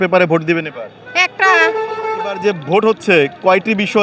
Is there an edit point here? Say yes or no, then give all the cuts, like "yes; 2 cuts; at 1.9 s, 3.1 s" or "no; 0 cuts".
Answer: yes; 1 cut; at 2.4 s